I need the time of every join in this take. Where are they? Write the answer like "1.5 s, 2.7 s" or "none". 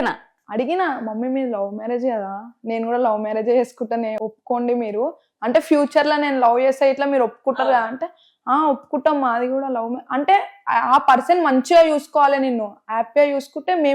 4.2 s